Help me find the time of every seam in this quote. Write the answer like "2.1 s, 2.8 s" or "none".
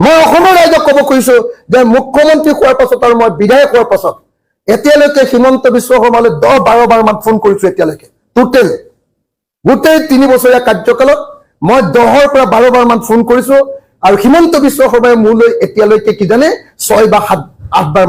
none